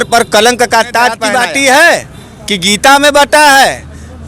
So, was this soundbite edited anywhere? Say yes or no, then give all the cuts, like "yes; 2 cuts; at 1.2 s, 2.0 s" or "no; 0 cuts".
yes; 1 cut; at 1.2 s